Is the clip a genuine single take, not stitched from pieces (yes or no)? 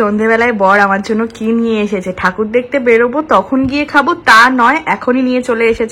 yes